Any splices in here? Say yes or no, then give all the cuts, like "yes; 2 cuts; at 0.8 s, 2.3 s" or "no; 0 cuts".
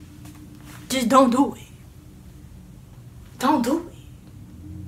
no; 0 cuts